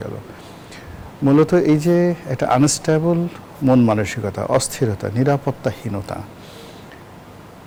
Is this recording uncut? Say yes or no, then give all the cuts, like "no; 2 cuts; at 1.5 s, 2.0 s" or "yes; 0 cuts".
yes; 0 cuts